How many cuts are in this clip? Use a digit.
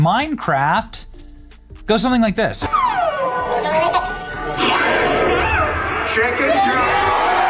1